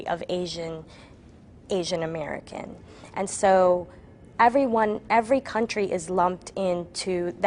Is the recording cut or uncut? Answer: uncut